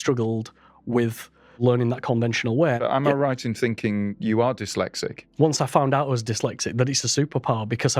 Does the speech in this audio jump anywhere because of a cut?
yes; 4 cuts; at 1.6 s, 2.8 s, 4.2 s, 5.1 s

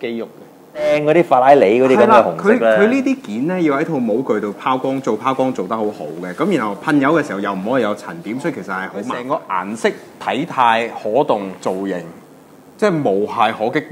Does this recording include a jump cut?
yes; 2 cuts; at 0.9 s, 9.2 s

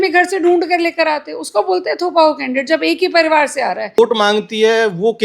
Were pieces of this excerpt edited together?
yes; 1 cut; at 4.0 s

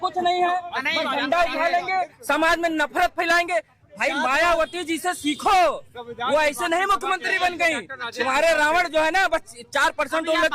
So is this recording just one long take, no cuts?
yes; 0 cuts

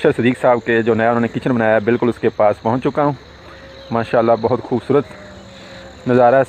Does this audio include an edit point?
no; 0 cuts

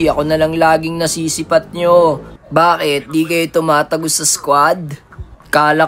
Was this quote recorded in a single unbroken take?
yes; 0 cuts

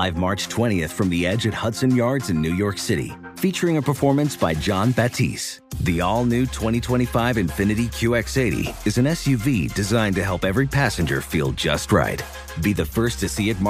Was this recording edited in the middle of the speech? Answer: no; 0 cuts

